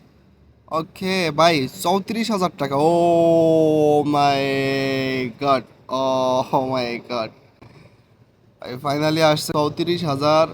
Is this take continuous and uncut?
no; 1 cut; at 9.4 s

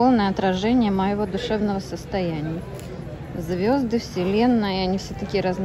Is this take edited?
no; 0 cuts

